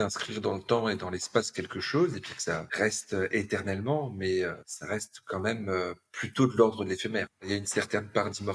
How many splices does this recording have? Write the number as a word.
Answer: three